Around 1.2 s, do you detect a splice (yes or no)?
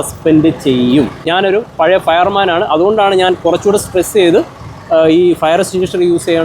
yes